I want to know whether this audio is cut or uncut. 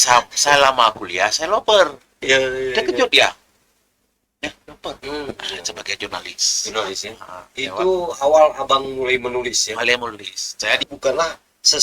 cut